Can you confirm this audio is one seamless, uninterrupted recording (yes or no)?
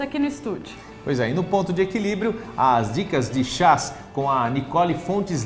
yes